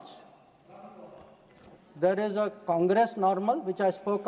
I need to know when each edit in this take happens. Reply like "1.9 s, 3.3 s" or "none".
none